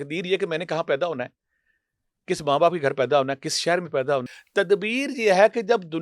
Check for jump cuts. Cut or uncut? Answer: cut